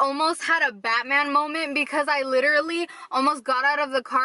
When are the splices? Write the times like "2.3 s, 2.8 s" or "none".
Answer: none